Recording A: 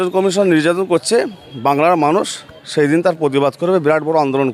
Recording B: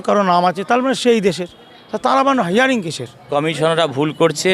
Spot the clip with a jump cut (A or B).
B